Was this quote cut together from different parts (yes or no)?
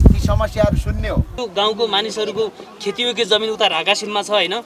yes